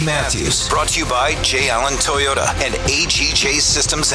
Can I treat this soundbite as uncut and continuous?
no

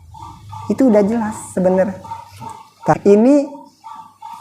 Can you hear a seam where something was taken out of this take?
yes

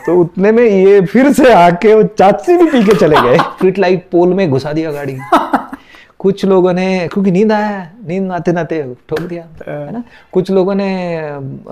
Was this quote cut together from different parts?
yes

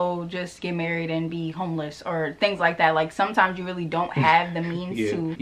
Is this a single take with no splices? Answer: yes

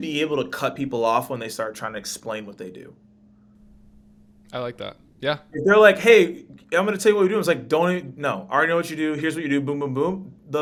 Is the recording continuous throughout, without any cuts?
yes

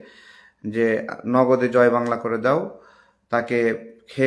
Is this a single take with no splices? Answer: yes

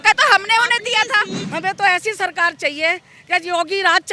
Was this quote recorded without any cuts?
no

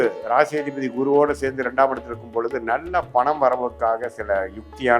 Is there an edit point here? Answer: no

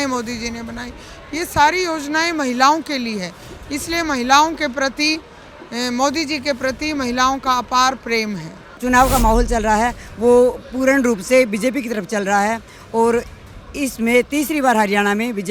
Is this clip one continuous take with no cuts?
no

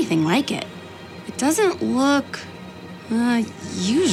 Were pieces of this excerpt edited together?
yes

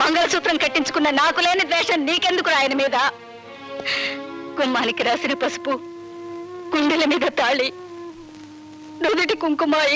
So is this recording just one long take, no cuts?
yes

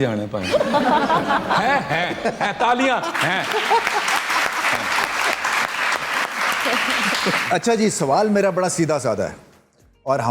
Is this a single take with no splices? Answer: yes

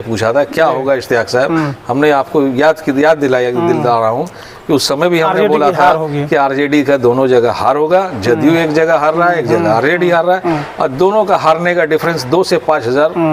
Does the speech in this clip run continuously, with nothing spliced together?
yes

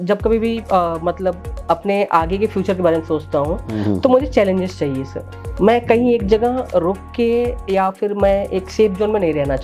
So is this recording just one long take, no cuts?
yes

